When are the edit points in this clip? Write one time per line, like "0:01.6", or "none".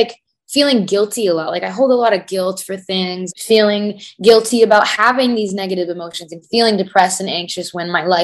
0:03.2